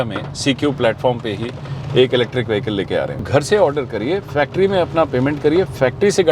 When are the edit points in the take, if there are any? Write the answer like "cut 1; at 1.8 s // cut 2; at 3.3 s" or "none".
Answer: cut 1; at 3.2 s